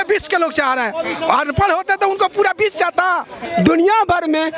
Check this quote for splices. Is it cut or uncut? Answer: cut